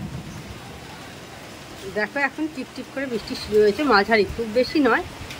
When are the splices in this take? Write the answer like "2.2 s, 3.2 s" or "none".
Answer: none